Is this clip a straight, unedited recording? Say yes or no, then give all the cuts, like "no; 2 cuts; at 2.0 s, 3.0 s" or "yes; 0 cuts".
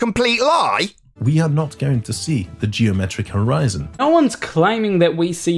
no; 2 cuts; at 1.2 s, 4.0 s